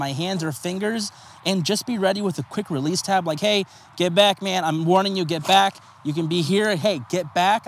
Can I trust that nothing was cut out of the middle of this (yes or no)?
yes